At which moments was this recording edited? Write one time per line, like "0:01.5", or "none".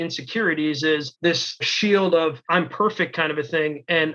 0:01.6
0:02.4

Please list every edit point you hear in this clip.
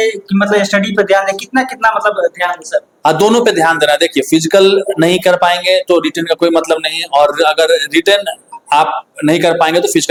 none

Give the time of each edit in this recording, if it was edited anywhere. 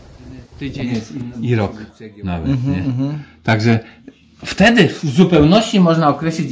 0:01.3

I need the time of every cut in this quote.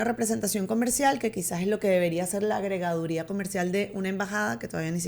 none

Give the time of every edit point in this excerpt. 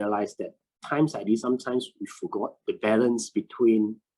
0:02.6

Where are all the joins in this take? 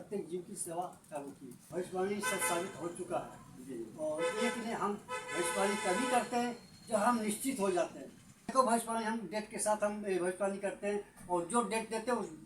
0:01.6
0:08.5

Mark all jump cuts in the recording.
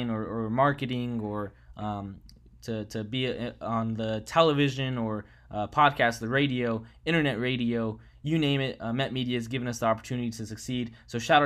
none

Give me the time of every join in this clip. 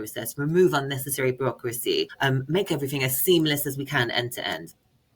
0:02.1

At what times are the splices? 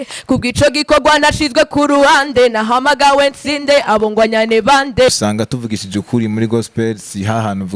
0:05.1

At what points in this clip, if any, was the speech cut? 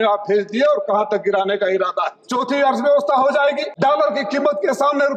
0:02.1
0:03.7

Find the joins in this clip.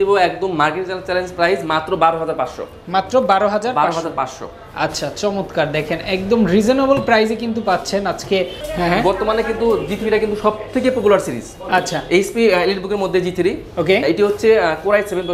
none

